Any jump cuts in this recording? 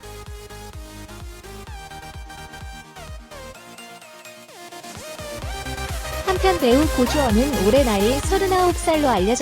no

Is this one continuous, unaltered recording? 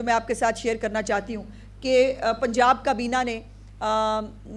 yes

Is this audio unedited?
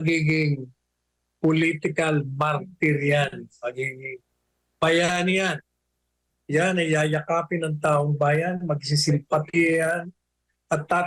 yes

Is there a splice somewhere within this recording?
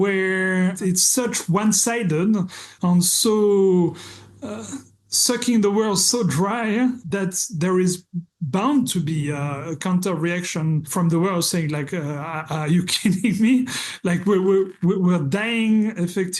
yes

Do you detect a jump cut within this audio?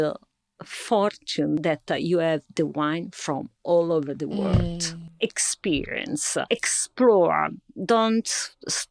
yes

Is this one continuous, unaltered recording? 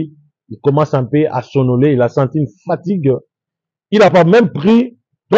yes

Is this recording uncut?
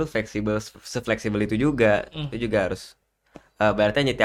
yes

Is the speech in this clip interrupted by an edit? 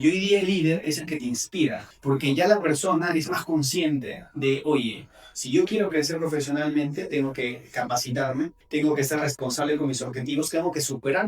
yes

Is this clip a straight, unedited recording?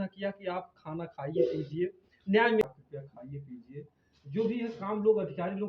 no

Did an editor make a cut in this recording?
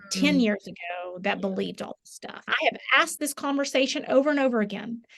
yes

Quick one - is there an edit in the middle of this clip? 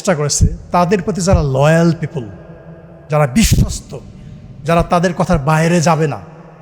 no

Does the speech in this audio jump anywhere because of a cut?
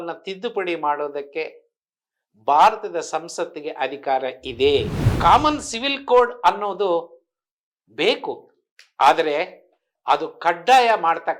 yes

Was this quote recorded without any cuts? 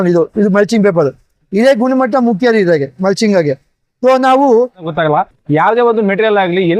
no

